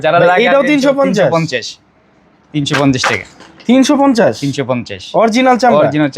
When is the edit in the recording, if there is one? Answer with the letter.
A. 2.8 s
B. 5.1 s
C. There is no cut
C